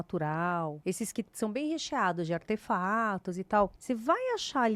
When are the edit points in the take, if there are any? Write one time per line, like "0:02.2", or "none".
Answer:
0:00.8
0:03.8